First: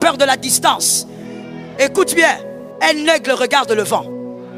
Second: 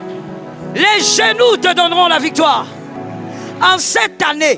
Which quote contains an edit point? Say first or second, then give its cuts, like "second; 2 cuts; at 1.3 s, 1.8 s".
second; 1 cut; at 3.5 s